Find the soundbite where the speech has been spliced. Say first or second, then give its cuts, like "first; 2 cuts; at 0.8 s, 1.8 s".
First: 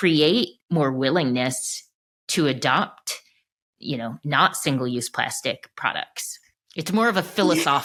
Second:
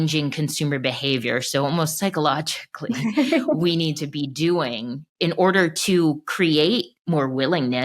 second; 1 cut; at 5.1 s